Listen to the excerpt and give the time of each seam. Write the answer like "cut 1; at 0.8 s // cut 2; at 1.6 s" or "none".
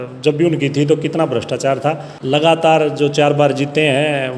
cut 1; at 2.1 s